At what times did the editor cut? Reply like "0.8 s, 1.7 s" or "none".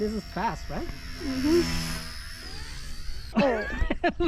3.3 s